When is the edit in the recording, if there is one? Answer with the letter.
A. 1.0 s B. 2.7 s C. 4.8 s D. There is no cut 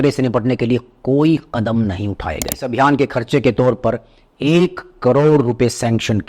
B